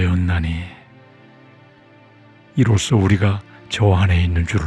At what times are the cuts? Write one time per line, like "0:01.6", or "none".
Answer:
0:01.0
0:02.5